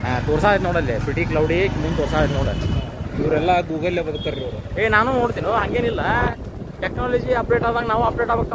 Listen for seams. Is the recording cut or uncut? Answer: uncut